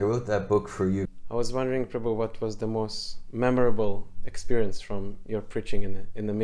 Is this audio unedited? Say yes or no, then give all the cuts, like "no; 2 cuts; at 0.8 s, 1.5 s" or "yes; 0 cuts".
no; 1 cut; at 1.2 s